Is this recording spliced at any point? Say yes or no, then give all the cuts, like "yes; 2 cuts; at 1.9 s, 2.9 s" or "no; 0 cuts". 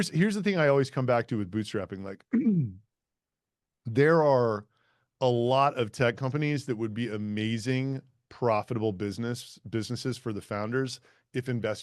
no; 0 cuts